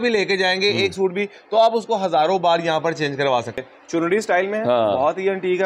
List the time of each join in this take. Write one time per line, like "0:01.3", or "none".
0:03.7